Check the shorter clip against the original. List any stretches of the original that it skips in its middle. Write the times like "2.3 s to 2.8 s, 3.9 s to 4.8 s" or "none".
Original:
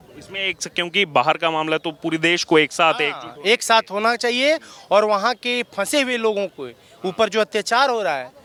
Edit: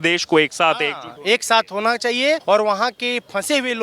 4.6 s to 4.8 s